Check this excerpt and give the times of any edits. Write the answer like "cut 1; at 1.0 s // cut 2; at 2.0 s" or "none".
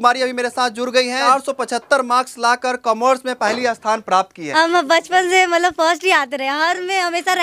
cut 1; at 1.3 s // cut 2; at 4.4 s